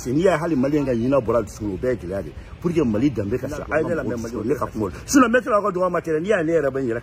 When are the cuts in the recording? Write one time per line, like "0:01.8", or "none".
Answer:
0:04.3